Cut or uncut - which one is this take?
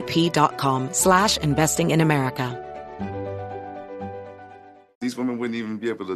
cut